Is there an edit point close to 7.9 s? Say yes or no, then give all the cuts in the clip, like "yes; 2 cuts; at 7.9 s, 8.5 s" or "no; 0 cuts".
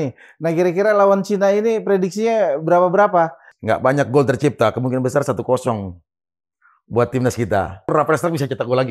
yes; 2 cuts; at 3.5 s, 7.9 s